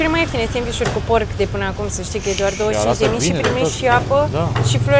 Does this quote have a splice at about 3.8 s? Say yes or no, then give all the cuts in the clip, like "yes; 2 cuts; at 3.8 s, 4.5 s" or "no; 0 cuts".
no; 0 cuts